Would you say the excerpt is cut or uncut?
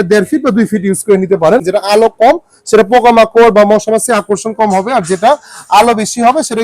cut